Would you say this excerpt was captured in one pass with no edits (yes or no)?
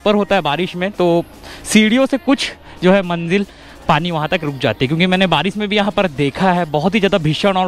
yes